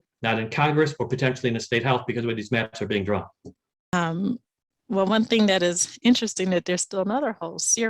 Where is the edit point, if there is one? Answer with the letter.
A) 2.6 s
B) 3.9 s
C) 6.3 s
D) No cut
B